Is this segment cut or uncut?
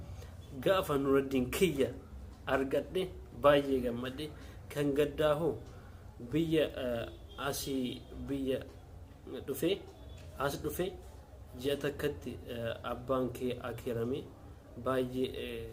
uncut